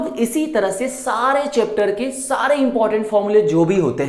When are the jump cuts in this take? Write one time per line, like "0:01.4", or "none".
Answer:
none